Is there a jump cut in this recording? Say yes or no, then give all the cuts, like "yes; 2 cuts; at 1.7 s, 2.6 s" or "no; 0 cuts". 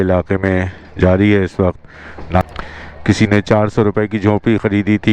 yes; 1 cut; at 2.4 s